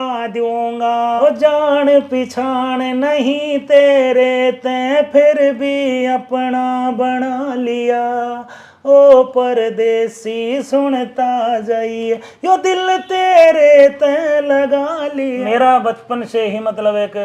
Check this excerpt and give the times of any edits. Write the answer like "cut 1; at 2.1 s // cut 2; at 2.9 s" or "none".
cut 1; at 1.2 s // cut 2; at 15.4 s